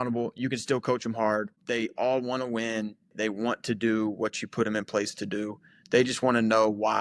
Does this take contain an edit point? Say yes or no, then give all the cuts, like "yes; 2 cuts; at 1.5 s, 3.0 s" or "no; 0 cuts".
yes; 1 cut; at 3.1 s